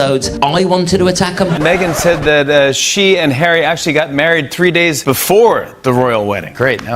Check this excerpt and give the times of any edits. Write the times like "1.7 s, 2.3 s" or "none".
1.4 s